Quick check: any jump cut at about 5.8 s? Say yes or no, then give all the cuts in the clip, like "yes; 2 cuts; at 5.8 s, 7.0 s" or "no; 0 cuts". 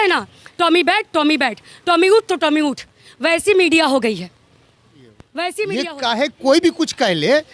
yes; 1 cut; at 5.8 s